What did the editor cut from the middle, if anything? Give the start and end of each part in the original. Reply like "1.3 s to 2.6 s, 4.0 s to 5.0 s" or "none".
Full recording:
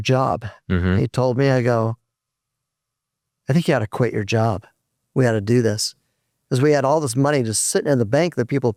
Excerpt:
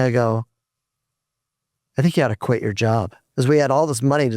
4.7 s to 6.3 s